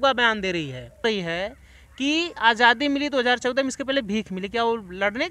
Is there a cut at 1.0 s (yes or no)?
yes